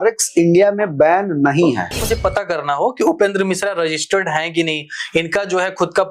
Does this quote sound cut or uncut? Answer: cut